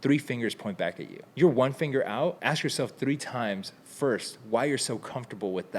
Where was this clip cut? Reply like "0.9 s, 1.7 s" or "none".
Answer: 1.3 s, 2.4 s